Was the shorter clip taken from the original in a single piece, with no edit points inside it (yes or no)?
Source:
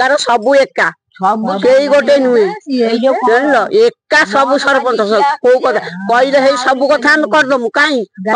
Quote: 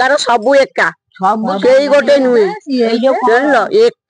yes